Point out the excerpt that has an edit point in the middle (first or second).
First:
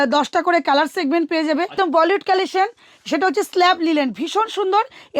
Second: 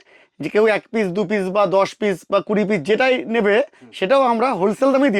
first